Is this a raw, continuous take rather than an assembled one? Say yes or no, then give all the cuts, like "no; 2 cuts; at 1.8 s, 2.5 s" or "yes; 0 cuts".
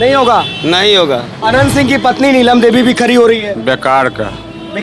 no; 1 cut; at 1.3 s